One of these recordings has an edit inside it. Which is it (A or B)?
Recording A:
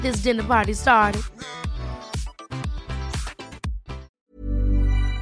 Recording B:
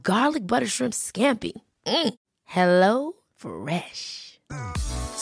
A